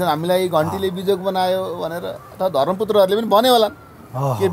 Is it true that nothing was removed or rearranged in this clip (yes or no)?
yes